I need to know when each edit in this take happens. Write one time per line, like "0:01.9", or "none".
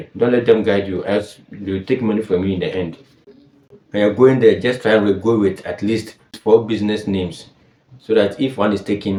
none